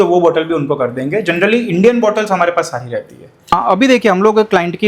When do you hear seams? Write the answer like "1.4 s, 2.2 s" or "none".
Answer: 3.4 s